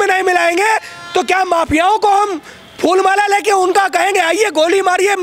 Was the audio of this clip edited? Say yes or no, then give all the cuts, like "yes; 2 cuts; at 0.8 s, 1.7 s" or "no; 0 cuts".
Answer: no; 0 cuts